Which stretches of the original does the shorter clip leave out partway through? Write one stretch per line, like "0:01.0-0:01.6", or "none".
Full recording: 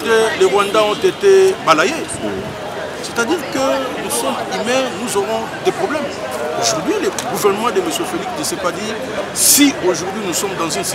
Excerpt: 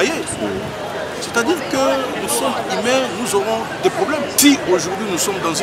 0:06.1-0:09.5